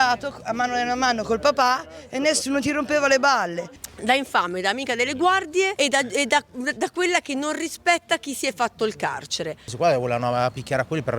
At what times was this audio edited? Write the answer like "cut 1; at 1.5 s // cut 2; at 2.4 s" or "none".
cut 1; at 3.9 s // cut 2; at 5.7 s // cut 3; at 9.7 s